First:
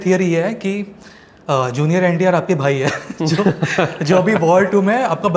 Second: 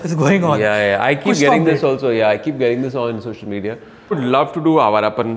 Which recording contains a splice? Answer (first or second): second